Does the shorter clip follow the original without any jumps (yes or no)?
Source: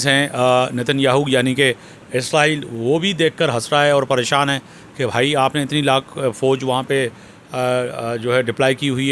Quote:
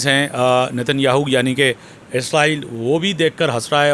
yes